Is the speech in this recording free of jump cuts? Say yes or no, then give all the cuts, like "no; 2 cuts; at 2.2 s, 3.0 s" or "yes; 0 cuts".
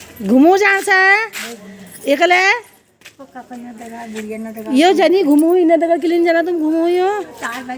yes; 0 cuts